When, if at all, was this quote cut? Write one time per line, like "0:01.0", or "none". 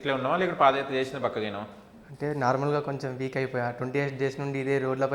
none